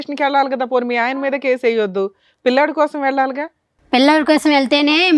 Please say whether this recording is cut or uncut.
uncut